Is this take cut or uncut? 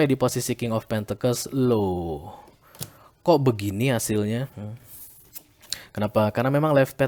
uncut